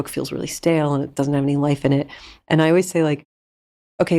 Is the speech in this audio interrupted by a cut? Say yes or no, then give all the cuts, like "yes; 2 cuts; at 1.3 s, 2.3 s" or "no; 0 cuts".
no; 0 cuts